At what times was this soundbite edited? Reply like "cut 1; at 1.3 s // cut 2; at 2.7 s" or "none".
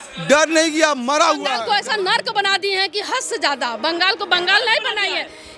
cut 1; at 1.6 s